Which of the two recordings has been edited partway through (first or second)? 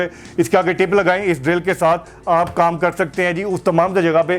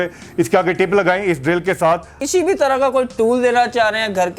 second